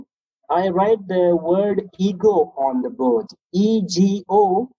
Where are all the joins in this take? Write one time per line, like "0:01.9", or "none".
none